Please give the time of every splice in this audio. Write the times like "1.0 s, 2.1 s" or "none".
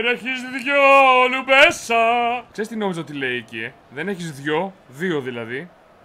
2.5 s